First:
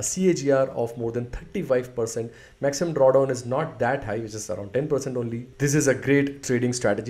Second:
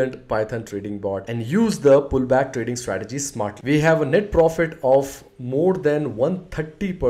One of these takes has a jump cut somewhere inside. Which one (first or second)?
second